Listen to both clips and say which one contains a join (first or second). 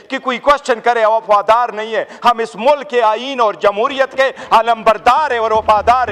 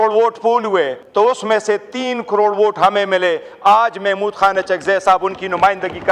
second